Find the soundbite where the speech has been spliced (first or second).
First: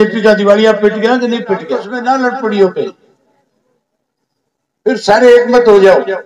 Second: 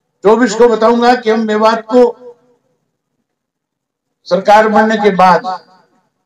first